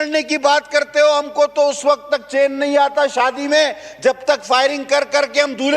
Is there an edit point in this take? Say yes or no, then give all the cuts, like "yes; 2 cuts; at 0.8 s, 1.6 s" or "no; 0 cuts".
no; 0 cuts